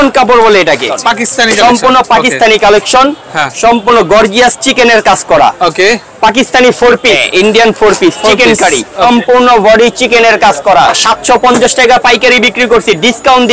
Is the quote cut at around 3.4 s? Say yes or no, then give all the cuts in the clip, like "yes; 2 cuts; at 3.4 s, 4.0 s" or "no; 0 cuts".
no; 4 cuts; at 0.9 s, 7.2 s, 9.0 s, 11.0 s